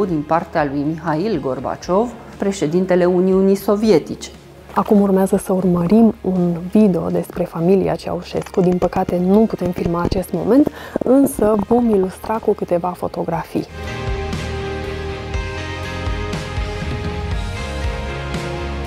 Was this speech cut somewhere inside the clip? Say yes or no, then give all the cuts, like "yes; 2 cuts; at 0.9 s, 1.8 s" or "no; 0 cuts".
no; 0 cuts